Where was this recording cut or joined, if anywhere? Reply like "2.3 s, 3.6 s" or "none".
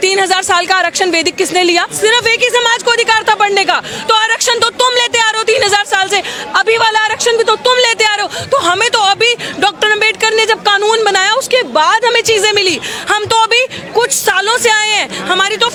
none